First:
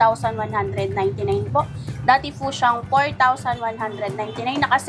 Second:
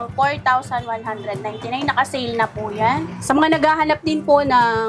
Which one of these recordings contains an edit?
second; 1 cut; at 3.1 s

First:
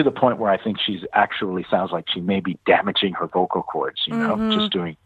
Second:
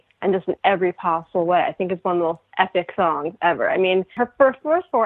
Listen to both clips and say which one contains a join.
second; 1 cut; at 4.1 s

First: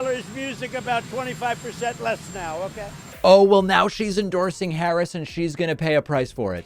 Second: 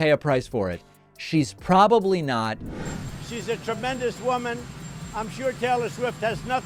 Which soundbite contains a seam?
first; 1 cut; at 3.1 s

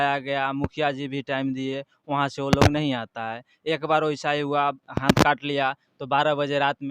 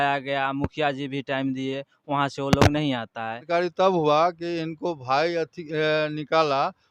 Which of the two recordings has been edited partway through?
second; 1 cut; at 3.4 s

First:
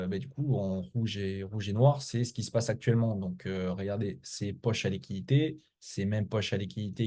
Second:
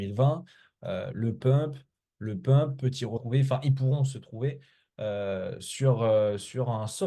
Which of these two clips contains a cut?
second; 1 cut; at 3.1 s

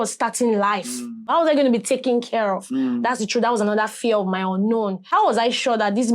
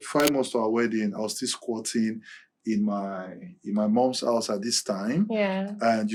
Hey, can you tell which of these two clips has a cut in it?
first; 2 cuts; at 1.2 s, 5.0 s

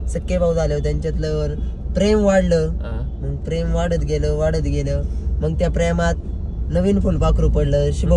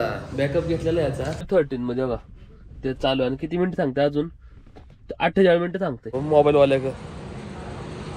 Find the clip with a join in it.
second; 2 cuts; at 1.5 s, 6.2 s

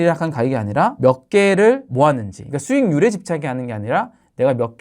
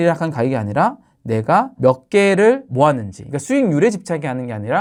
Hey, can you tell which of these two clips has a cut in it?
first; 1 cut; at 0.9 s

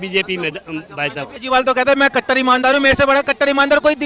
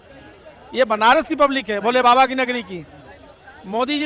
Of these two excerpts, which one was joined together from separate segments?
first; 1 cut; at 1.3 s

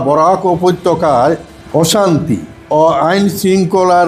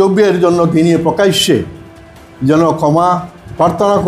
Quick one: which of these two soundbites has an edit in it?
first; 2 cuts; at 1.6 s, 2.5 s

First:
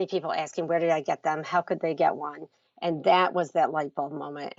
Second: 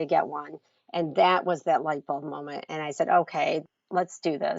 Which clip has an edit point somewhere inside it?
second; 1 cut; at 3.6 s

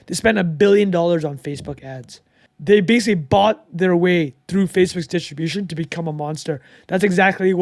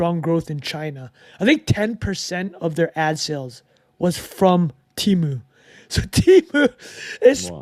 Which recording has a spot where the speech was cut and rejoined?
first; 1 cut; at 2.5 s

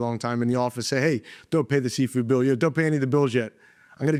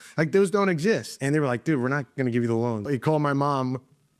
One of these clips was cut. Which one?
second; 2 cuts; at 1.1 s, 2.9 s

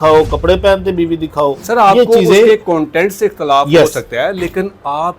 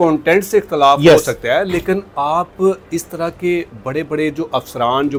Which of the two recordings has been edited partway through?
first; 1 cut; at 1.6 s

